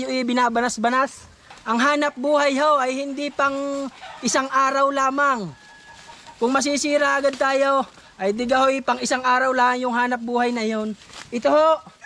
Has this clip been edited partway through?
yes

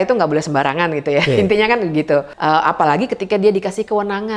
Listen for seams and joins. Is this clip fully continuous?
no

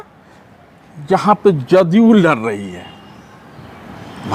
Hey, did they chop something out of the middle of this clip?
no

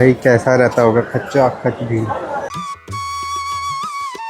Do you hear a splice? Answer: no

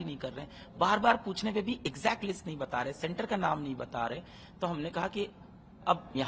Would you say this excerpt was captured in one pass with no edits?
yes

